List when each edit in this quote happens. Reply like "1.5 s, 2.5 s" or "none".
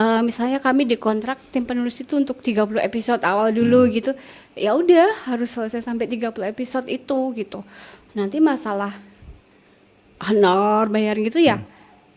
none